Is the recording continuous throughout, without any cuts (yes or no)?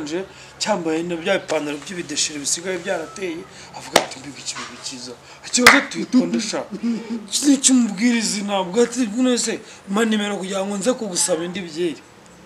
yes